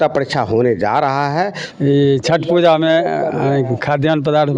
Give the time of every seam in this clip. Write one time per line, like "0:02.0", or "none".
0:01.6